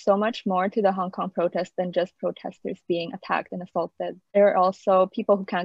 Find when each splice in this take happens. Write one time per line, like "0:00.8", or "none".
none